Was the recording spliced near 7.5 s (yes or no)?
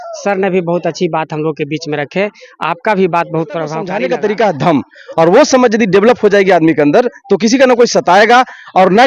no